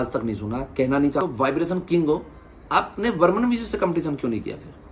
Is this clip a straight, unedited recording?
no; 1 cut; at 1.2 s

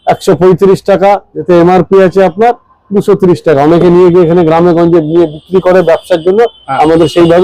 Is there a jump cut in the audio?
yes; 1 cut; at 1.3 s

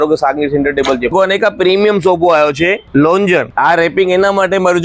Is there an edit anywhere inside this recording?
yes; 3 cuts; at 1.1 s, 2.8 s, 3.5 s

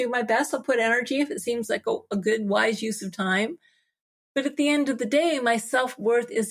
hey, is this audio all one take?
yes; 0 cuts

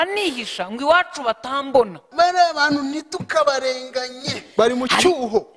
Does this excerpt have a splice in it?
yes; 1 cut; at 2.0 s

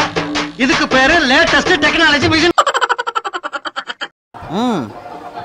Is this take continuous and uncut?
no; 2 cuts; at 2.5 s, 4.1 s

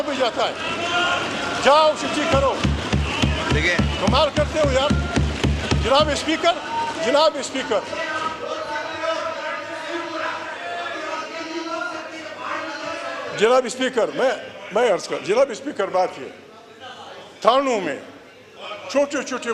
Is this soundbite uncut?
yes; 0 cuts

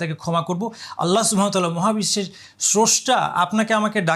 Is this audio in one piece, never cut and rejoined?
yes; 0 cuts

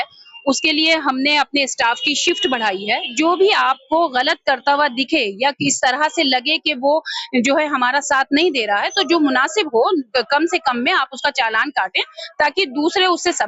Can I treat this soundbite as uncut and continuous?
no; 1 cut; at 3.1 s

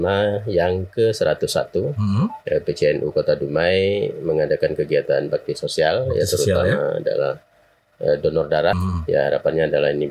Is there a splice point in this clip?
yes; 1 cut; at 8.8 s

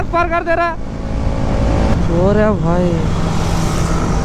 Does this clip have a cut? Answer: no; 0 cuts

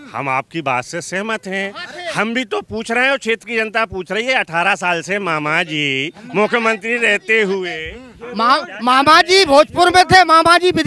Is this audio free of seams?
yes; 0 cuts

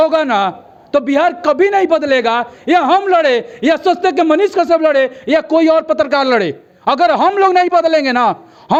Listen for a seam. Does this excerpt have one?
no; 0 cuts

